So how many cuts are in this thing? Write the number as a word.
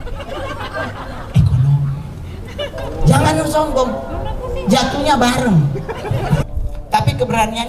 one